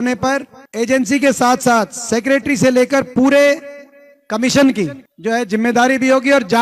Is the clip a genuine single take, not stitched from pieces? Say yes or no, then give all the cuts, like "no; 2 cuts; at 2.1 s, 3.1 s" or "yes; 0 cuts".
yes; 0 cuts